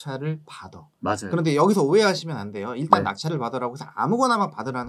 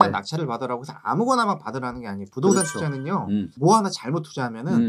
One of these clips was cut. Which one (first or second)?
second